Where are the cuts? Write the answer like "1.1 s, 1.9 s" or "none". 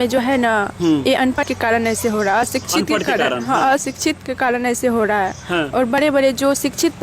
1.4 s